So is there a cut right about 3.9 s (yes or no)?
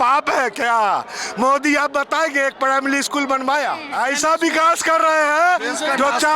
yes